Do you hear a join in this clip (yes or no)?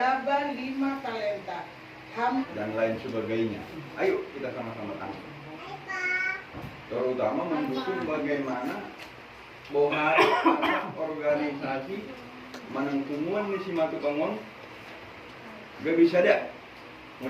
yes